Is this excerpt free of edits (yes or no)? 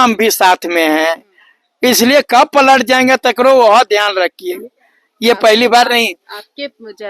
yes